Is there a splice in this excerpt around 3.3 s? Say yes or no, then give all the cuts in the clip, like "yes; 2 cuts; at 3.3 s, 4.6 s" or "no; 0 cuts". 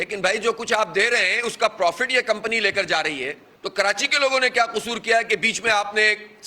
no; 0 cuts